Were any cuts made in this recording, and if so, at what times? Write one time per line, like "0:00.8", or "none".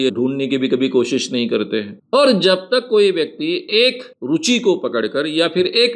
0:01.9